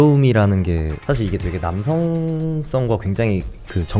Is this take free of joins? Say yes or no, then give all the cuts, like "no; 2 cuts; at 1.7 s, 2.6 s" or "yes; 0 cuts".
no; 1 cut; at 0.9 s